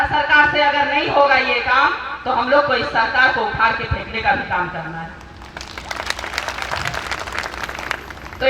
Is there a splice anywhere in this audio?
no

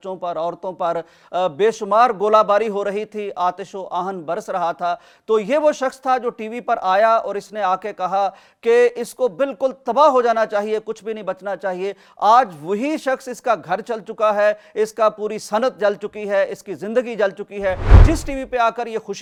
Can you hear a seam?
no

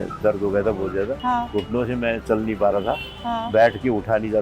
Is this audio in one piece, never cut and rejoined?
no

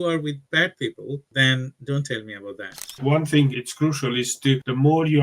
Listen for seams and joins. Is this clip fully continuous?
no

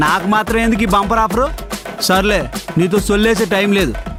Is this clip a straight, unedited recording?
yes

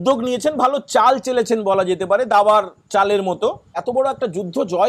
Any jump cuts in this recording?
yes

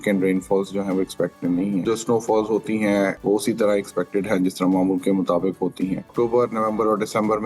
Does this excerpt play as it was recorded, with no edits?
no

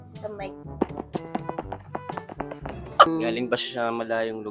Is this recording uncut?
no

